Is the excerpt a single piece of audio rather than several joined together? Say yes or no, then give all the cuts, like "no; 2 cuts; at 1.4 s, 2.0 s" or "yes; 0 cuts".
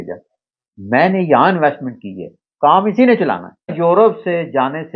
no; 1 cut; at 3.7 s